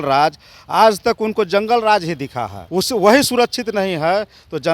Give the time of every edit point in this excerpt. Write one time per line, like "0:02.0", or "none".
0:02.6